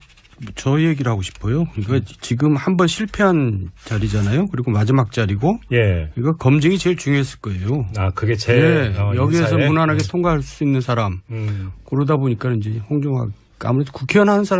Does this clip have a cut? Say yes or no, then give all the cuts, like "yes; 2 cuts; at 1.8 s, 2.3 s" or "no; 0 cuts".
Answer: yes; 1 cut; at 11.2 s